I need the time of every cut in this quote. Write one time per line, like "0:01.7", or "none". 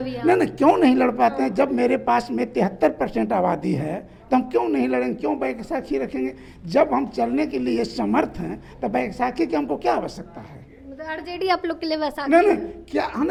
none